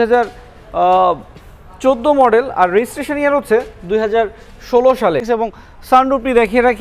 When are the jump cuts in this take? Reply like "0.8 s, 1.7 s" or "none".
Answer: 5.2 s